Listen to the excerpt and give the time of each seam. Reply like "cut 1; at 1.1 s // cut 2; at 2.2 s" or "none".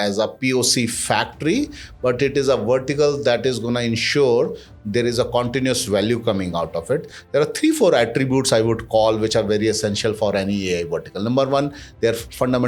none